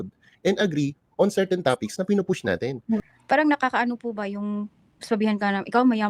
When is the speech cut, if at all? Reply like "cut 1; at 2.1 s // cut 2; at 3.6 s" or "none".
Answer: cut 1; at 2.9 s